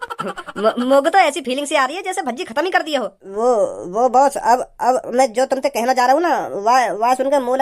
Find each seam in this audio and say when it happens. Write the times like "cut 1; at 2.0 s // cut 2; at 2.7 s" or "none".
cut 1; at 3.2 s